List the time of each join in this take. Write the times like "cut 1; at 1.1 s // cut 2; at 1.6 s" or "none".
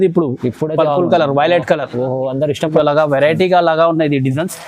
cut 1; at 2.7 s